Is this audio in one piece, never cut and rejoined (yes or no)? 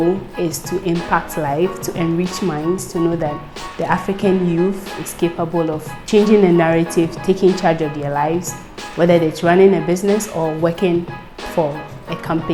yes